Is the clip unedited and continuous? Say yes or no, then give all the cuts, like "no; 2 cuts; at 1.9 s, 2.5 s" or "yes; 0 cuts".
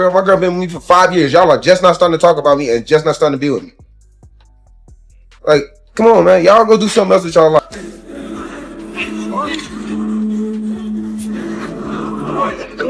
no; 1 cut; at 7.6 s